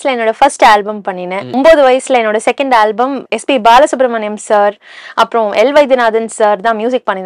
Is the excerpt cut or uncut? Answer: cut